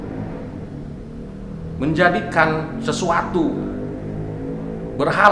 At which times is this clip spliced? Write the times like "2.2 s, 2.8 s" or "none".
none